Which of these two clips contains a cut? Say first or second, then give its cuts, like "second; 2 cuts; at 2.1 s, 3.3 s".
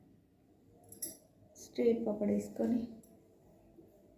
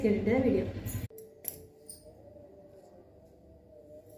second; 1 cut; at 1.1 s